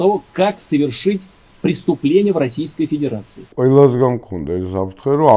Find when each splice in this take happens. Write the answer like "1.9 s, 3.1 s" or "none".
3.4 s